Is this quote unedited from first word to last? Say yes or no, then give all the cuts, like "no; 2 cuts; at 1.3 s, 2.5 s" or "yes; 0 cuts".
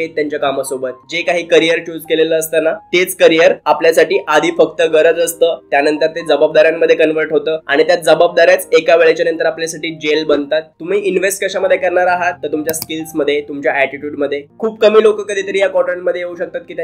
no; 3 cuts; at 1.0 s, 10.7 s, 14.4 s